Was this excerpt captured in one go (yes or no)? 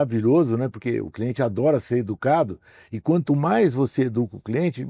yes